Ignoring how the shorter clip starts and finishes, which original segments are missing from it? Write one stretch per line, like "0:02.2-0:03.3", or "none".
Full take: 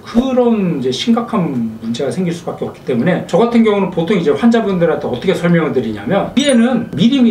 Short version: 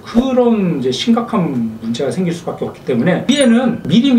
0:03.2-0:06.3